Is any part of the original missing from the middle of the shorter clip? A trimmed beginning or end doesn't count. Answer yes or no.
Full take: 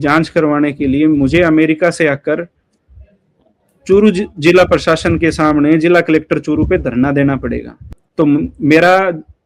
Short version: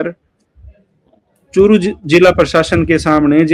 no